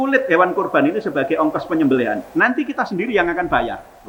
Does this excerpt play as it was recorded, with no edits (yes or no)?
yes